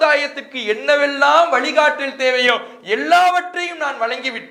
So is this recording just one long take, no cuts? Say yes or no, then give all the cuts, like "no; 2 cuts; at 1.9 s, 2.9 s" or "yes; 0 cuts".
yes; 0 cuts